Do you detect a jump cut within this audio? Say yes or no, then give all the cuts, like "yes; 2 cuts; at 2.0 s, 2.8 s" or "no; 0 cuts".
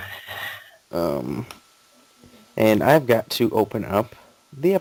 no; 0 cuts